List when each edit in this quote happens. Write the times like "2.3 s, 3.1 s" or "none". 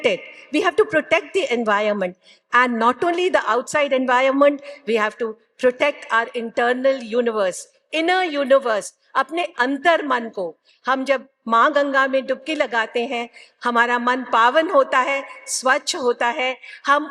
none